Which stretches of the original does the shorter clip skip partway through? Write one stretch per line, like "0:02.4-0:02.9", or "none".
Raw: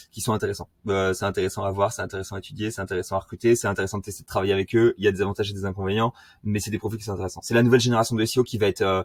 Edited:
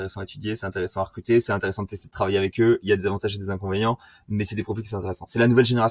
none